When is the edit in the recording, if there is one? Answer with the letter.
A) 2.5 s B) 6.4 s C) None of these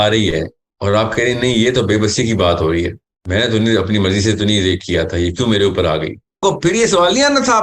B